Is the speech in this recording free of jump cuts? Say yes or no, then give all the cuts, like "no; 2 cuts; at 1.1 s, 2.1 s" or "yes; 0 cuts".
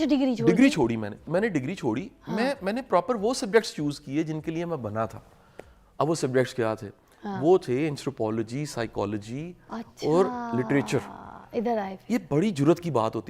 no; 1 cut; at 1.2 s